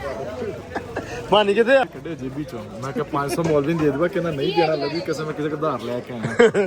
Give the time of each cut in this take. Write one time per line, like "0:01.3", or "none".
0:01.8